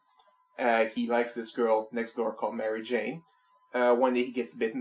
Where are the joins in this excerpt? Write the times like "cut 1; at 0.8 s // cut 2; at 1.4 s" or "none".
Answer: none